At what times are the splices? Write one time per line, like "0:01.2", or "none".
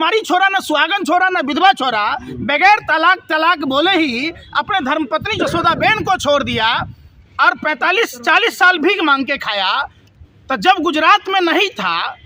none